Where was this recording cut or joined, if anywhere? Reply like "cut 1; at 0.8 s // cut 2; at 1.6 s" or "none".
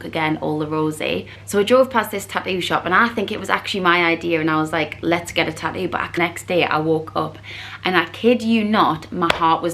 cut 1; at 1.3 s // cut 2; at 6.2 s